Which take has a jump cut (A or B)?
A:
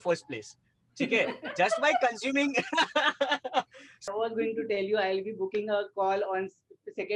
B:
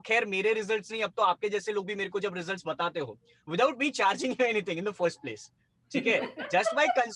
A